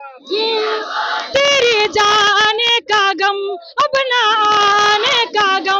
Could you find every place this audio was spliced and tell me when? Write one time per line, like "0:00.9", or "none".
none

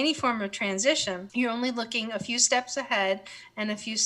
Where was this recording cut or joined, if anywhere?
0:01.2

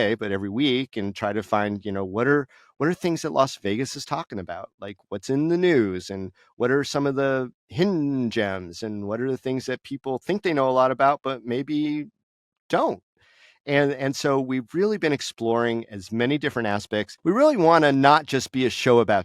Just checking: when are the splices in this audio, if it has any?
0:17.1

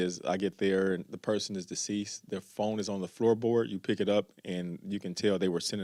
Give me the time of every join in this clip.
none

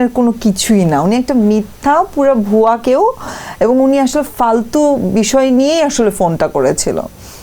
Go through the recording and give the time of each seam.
none

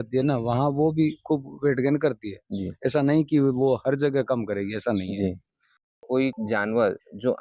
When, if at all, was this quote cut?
0:06.1

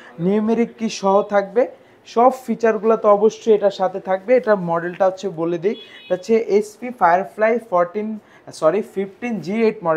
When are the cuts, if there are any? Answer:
none

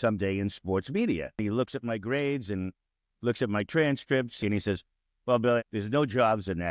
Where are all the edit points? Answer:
0:01.4
0:04.4
0:05.6

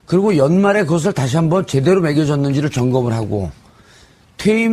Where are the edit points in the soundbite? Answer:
0:01.0

